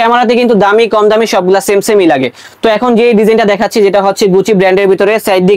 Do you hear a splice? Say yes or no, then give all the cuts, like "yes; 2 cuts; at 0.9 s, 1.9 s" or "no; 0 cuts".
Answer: no; 0 cuts